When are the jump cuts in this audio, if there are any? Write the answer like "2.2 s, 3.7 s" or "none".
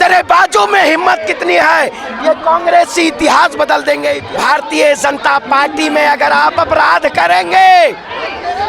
4.3 s